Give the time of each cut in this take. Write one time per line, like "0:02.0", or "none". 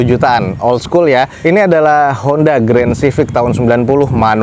none